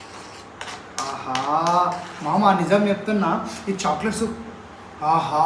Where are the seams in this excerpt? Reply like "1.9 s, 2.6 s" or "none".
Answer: none